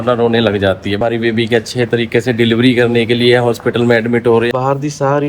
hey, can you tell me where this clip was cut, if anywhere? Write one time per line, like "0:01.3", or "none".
0:01.0
0:04.5

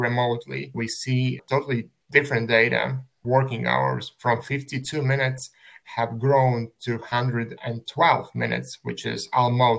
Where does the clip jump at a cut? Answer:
0:02.0

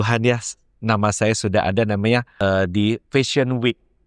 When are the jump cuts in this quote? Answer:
0:02.3

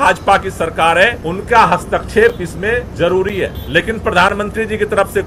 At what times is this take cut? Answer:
0:01.2
0:02.9
0:03.6

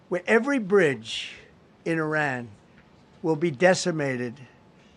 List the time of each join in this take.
0:01.2

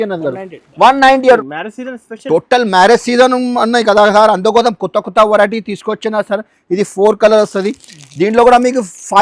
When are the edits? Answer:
0:01.2

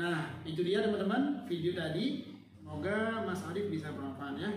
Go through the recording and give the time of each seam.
0:02.7

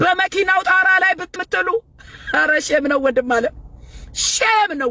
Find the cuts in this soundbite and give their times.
0:01.3

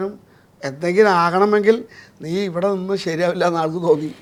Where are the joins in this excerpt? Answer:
none

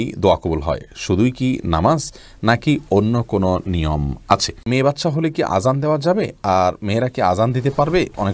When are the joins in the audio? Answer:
0:04.6

